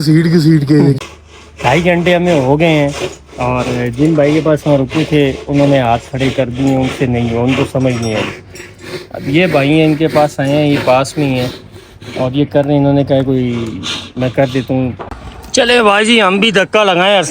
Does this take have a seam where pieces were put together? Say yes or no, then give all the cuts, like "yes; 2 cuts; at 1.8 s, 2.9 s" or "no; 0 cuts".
yes; 2 cuts; at 1.0 s, 15.1 s